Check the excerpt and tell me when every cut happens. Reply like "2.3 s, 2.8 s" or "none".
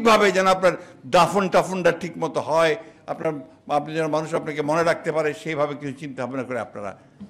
none